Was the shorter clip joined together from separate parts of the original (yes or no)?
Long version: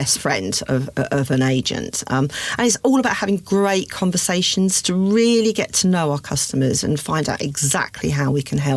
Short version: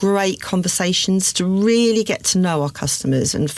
no